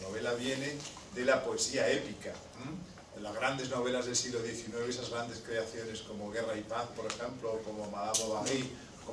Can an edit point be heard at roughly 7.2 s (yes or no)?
no